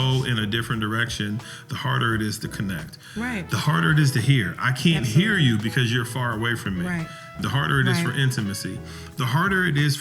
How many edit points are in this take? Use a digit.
1